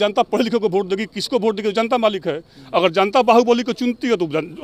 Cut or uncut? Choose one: uncut